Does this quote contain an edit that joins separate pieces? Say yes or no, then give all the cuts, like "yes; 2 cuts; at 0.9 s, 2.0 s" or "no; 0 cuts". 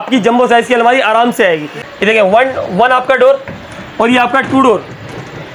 yes; 1 cut; at 1.8 s